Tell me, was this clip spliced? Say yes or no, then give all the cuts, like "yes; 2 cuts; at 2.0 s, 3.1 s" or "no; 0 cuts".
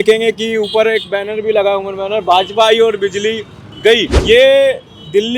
yes; 1 cut; at 4.1 s